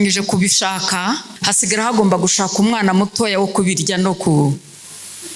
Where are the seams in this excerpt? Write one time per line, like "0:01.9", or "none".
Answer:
0:01.4